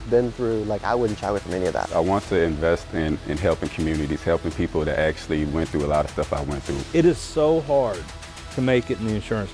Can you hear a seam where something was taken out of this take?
yes; 2 cuts; at 1.9 s, 6.7 s

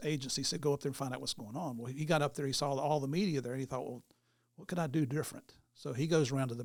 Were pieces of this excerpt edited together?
no; 0 cuts

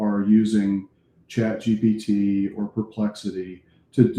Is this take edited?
no; 0 cuts

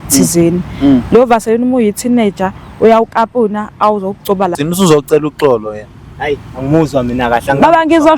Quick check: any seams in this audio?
yes; 1 cut; at 4.5 s

